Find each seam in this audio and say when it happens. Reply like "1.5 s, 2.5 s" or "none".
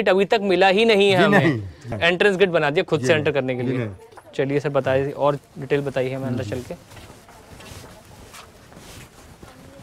none